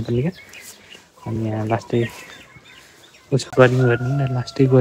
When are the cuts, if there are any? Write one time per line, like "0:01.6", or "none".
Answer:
0:03.5